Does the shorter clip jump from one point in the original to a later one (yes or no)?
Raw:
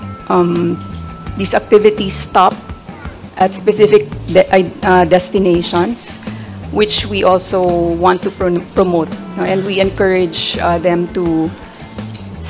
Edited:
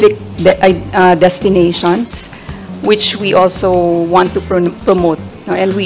no